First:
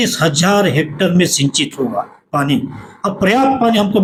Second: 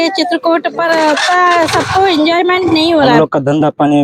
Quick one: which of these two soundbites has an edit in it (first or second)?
second